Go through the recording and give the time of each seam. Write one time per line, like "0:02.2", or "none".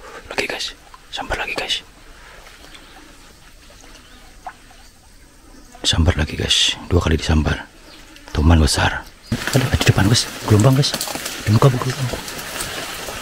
0:09.3

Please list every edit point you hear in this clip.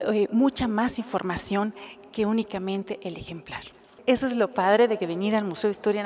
0:03.9

